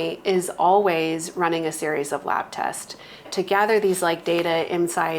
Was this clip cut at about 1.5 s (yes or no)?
no